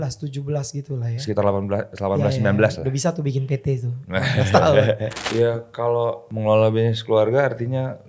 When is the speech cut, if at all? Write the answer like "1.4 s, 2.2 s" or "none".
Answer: 5.1 s, 6.3 s